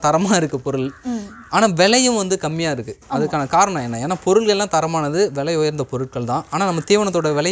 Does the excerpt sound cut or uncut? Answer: uncut